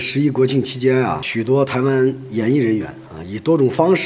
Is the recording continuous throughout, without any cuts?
no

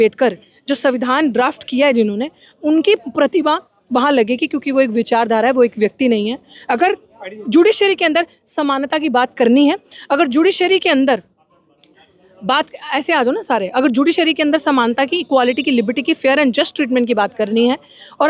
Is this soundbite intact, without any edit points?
yes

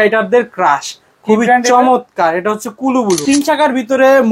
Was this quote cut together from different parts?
yes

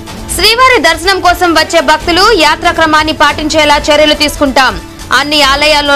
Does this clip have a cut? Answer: no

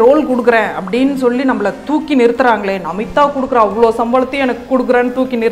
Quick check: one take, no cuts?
yes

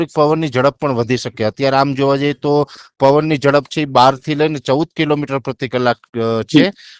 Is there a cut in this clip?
no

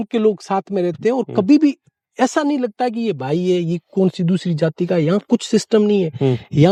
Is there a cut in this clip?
no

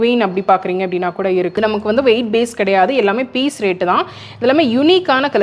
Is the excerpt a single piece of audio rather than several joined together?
no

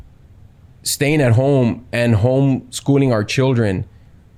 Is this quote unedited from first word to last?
yes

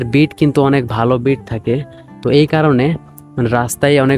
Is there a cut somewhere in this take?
no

